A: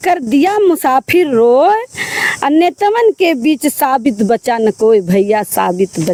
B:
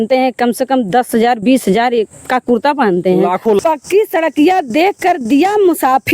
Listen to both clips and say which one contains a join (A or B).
B